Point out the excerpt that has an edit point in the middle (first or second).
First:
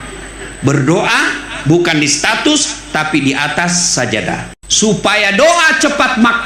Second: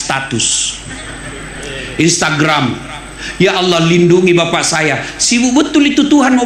first